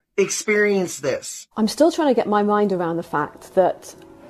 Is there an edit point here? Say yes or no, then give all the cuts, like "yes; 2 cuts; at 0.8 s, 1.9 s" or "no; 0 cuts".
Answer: yes; 1 cut; at 1.4 s